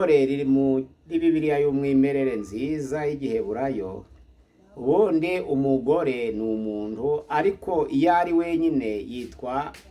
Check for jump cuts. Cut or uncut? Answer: uncut